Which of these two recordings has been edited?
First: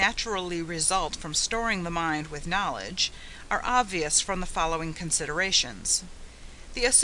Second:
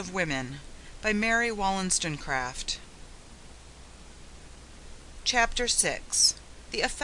second; 1 cut; at 0.9 s

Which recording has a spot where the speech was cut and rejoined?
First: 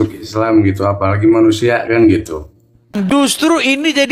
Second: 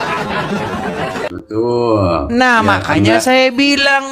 first; 1 cut; at 2.9 s

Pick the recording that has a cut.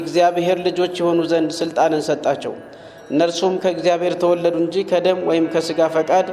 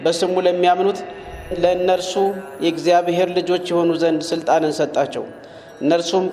second; 1 cut; at 1.5 s

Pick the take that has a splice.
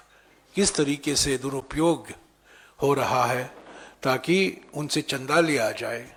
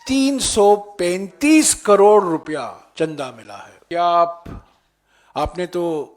second; 2 cuts; at 2.8 s, 3.8 s

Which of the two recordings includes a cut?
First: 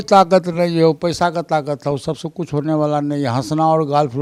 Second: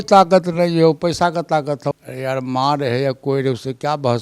second; 1 cut; at 2.0 s

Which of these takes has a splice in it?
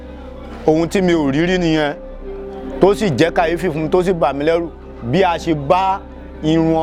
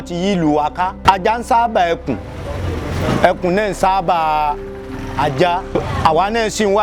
second; 2 cuts; at 1.0 s, 5.8 s

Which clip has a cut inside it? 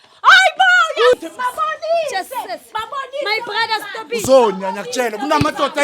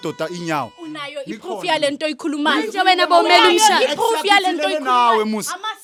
first; 1 cut; at 1.1 s

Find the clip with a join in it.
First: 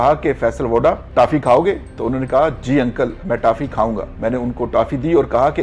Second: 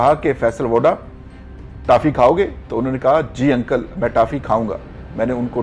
first; 2 cuts; at 1.0 s, 4.1 s

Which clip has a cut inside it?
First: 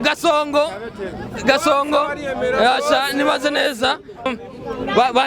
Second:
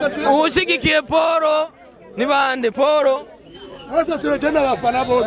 first; 1 cut; at 4.3 s

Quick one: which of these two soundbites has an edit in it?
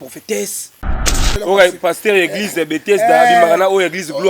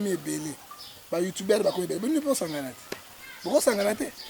first; 1 cut; at 1.1 s

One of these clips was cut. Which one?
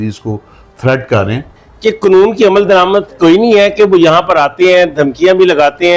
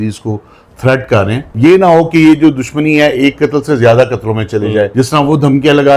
second; 2 cuts; at 1.4 s, 4.9 s

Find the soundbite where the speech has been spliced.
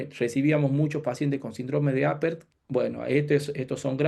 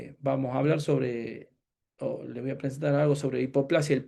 first; 1 cut; at 2.5 s

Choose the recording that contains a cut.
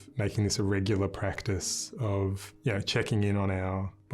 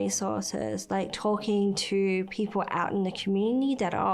first; 1 cut; at 2.5 s

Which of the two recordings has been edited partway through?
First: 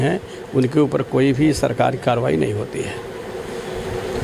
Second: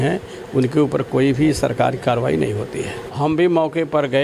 second; 1 cut; at 3.0 s

